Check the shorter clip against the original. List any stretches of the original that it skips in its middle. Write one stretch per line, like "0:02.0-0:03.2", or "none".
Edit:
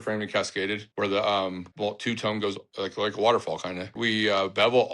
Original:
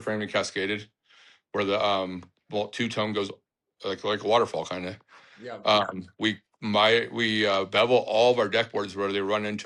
0:00.9-0:01.4
0:02.2-0:02.4
0:03.4-0:03.7
0:05.0-0:07.1